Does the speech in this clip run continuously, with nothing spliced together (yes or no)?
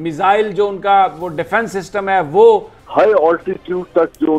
no